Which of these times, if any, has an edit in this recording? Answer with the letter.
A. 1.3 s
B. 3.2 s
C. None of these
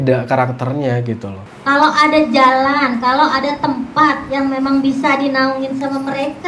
A